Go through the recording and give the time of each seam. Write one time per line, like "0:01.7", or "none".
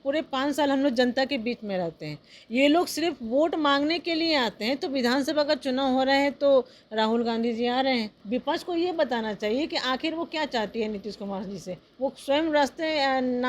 0:08.2